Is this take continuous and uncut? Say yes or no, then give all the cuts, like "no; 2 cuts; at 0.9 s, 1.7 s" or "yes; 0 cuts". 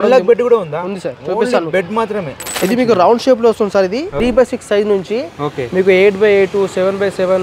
no; 2 cuts; at 2.5 s, 4.1 s